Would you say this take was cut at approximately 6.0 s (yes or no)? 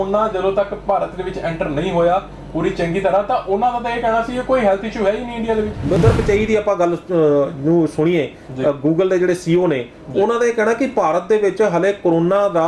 yes